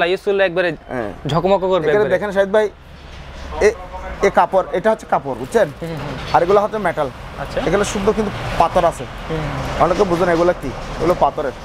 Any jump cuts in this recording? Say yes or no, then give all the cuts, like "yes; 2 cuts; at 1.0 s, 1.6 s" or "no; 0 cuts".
no; 0 cuts